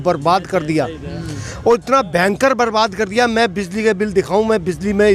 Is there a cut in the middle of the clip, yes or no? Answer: no